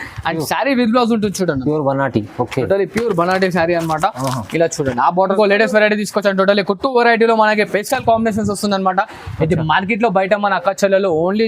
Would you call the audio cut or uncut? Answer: cut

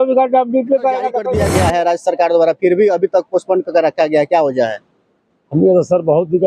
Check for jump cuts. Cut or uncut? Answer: cut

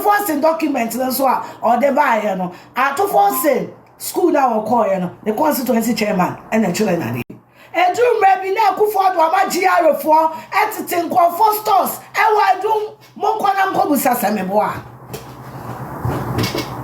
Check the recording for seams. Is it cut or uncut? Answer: uncut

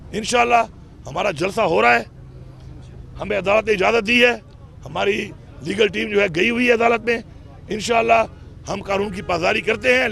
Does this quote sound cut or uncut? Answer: uncut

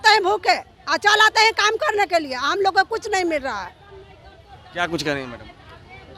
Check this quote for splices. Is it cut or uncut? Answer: uncut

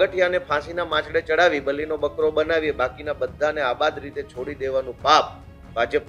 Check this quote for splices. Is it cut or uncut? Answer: uncut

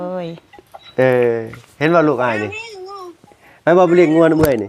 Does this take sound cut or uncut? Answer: uncut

